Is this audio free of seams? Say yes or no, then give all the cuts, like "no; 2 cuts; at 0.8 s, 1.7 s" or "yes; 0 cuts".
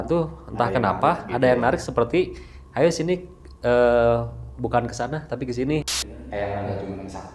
no; 1 cut; at 5.9 s